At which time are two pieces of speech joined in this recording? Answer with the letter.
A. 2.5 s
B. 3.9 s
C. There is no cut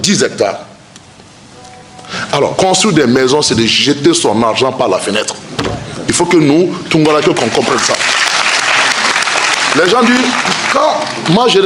A